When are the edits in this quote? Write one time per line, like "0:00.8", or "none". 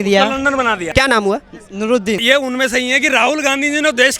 0:00.8
0:02.2

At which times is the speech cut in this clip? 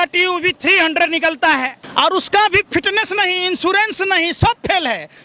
0:01.8

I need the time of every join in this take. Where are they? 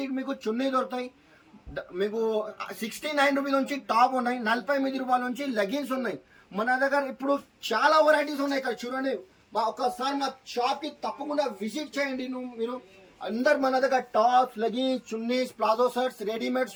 none

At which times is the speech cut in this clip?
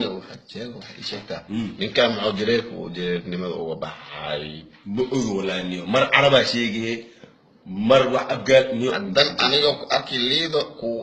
none

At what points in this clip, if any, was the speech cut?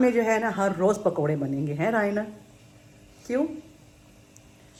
none

